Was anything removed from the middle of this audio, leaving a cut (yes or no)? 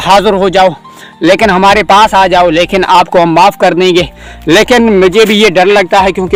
no